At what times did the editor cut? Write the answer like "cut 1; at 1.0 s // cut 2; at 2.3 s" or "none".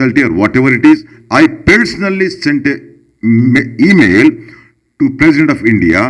cut 1; at 1.1 s